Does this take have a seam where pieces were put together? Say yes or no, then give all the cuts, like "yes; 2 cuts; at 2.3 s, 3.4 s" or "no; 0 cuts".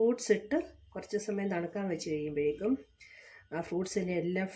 no; 0 cuts